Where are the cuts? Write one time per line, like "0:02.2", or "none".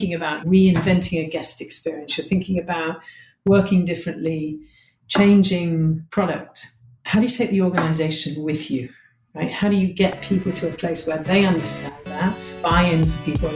none

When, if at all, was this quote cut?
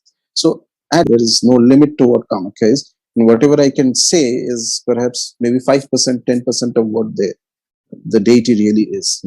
0:01.1

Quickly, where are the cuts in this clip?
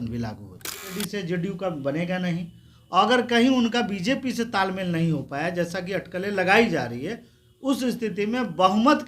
0:00.9

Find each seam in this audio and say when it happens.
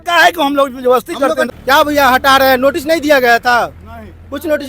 0:01.5

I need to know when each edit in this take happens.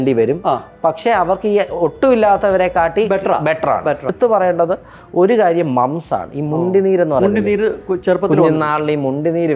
0:04.1

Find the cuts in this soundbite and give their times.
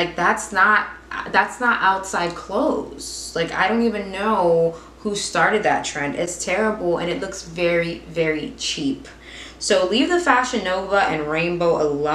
none

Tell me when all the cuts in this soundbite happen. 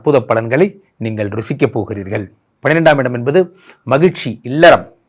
0:02.4

